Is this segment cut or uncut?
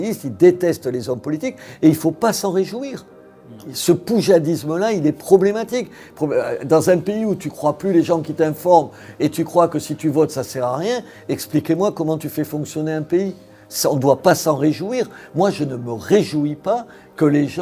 uncut